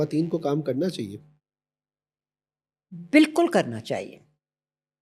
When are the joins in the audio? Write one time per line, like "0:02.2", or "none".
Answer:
none